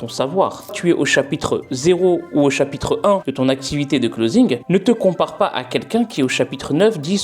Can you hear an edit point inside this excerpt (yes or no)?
yes